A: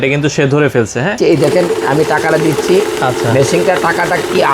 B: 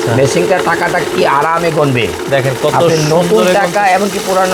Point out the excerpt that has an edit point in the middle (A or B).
A